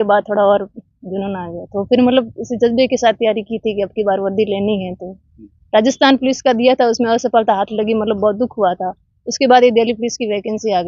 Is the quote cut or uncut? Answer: uncut